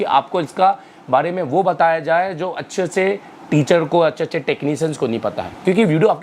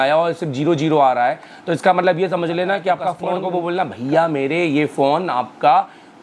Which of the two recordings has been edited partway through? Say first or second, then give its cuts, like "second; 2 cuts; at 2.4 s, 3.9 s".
second; 1 cut; at 3.3 s